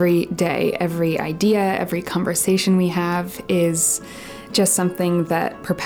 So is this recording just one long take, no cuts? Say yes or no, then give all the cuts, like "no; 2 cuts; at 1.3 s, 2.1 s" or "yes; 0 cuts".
yes; 0 cuts